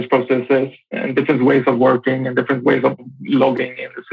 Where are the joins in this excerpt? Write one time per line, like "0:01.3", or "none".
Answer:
0:01.0
0:03.0

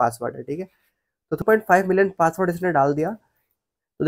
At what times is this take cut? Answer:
0:01.4

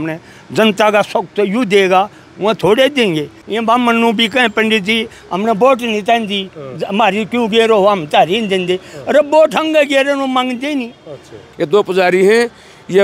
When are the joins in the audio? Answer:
0:03.4
0:11.4

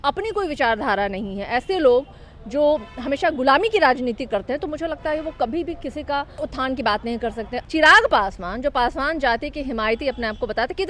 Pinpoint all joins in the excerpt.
0:06.4
0:07.6

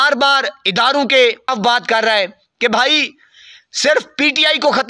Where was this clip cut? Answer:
none

